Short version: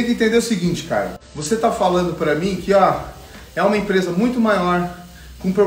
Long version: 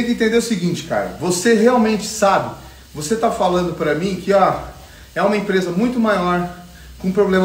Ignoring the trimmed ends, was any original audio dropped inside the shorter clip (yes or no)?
yes